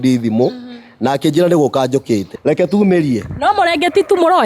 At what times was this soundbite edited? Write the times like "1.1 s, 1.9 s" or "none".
2.3 s